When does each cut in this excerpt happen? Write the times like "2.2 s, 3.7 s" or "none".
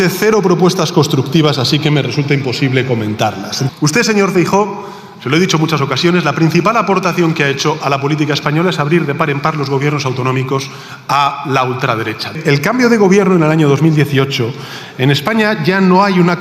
3.7 s, 12.3 s